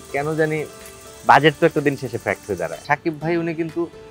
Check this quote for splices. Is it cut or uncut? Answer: cut